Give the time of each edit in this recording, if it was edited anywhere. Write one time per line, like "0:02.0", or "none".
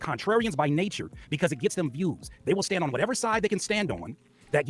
0:02.3